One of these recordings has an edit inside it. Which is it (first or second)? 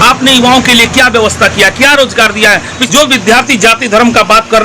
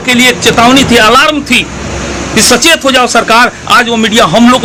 first